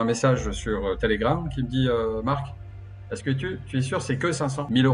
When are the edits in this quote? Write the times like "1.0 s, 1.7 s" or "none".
none